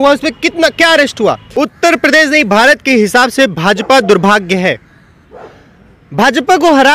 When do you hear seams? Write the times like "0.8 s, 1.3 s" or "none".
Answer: 1.5 s